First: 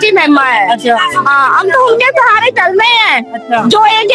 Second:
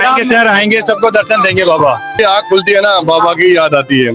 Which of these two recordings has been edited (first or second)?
second